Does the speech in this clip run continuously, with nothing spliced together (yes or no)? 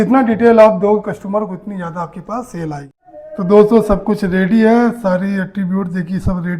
no